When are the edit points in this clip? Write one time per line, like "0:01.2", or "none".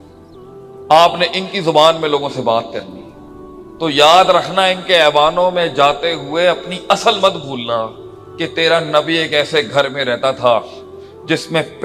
none